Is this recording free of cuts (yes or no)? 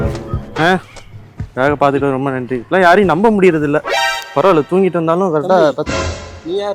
yes